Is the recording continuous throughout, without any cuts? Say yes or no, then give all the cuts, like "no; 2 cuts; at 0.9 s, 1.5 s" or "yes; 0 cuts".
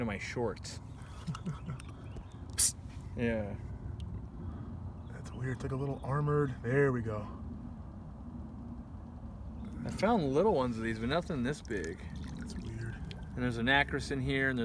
yes; 0 cuts